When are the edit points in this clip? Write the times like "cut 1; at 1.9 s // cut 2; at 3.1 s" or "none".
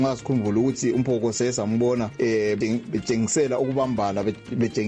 cut 1; at 2.6 s

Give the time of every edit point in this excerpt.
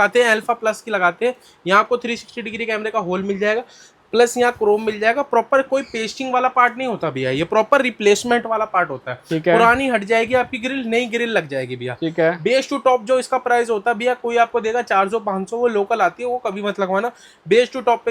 none

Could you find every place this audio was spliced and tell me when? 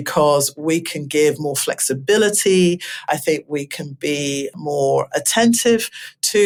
none

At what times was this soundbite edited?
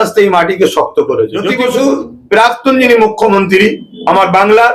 cut 1; at 1.4 s

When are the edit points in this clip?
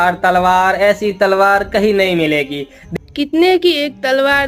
cut 1; at 2.8 s

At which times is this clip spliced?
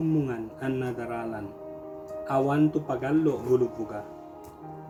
none

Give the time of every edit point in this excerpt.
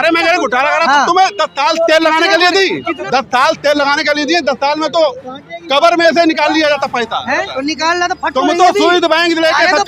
cut 1; at 2.9 s // cut 2; at 7.5 s

